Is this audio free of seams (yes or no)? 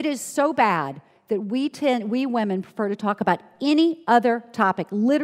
yes